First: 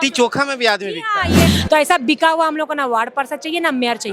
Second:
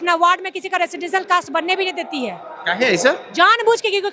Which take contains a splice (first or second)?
first